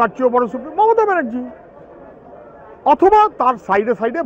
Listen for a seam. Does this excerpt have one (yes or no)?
no